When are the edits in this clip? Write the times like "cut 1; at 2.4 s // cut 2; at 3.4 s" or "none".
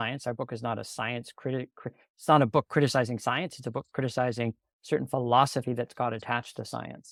none